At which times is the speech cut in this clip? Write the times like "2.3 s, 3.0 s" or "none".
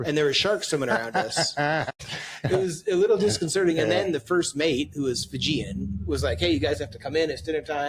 1.9 s